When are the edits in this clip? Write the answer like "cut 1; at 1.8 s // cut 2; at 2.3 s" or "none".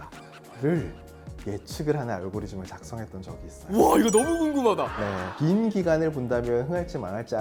none